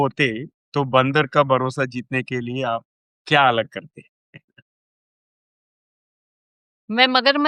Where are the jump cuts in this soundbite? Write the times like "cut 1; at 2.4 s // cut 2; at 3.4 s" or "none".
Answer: none